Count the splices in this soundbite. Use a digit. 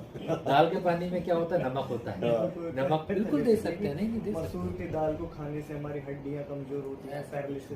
1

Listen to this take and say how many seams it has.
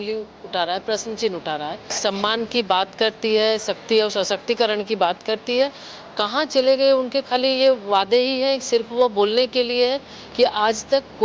1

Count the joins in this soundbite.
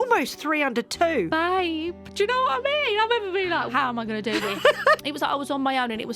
2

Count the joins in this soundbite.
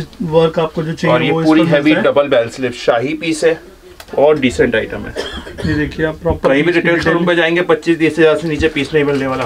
0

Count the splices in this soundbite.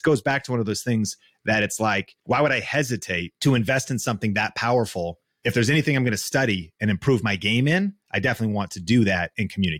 3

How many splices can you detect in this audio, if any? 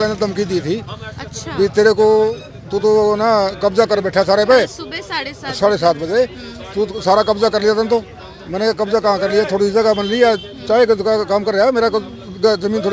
0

